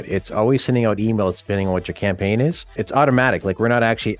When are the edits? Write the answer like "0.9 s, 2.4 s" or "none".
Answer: 2.8 s